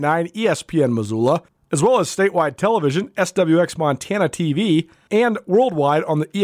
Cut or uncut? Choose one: cut